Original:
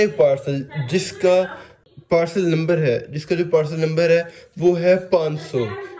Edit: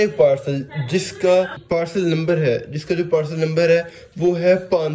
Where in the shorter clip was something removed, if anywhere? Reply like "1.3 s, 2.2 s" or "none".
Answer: 1.6 s